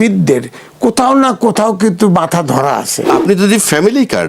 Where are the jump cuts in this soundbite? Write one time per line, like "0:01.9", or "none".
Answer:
0:03.2